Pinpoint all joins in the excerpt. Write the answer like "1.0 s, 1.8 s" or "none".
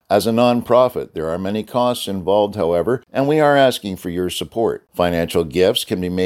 3.1 s